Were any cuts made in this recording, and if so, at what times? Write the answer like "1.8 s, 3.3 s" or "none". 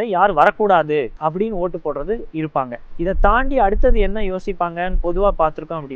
1.1 s, 2.8 s